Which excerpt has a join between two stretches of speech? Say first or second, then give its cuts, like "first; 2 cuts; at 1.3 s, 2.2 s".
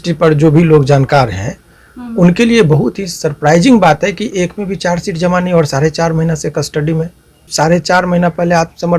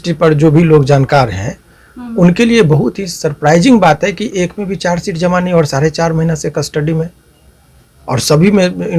first; 1 cut; at 7.5 s